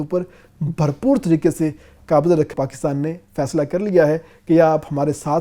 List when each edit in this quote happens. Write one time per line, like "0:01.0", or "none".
0:02.5